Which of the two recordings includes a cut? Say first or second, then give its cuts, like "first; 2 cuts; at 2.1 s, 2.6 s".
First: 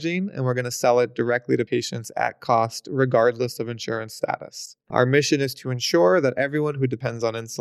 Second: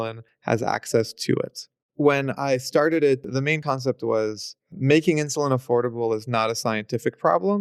second; 1 cut; at 1.8 s